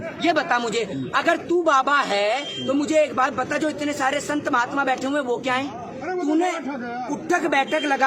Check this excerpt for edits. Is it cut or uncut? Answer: uncut